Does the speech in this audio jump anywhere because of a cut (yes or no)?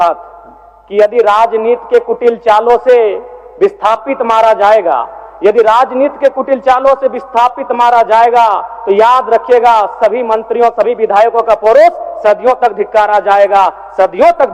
no